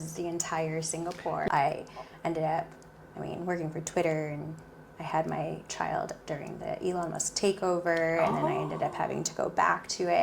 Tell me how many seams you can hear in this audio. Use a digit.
1